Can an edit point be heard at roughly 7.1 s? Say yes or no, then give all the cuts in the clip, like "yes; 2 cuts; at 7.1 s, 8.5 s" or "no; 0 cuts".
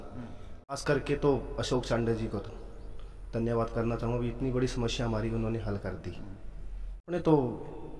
yes; 2 cuts; at 0.8 s, 7.1 s